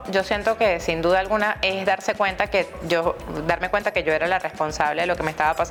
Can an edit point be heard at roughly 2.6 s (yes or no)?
no